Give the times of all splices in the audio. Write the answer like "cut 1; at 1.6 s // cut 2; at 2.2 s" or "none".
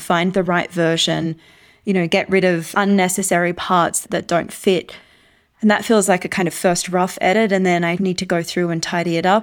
cut 1; at 2.7 s